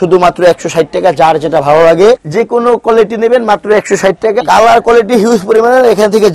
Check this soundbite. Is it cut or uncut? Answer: cut